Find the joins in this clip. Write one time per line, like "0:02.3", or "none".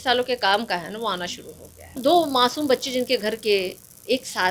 0:02.0